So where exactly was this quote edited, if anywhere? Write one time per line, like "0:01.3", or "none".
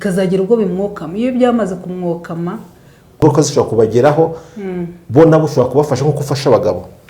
0:03.2